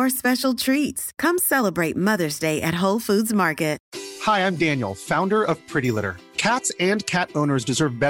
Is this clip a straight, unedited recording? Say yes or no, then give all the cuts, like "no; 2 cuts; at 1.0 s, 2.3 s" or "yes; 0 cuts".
yes; 0 cuts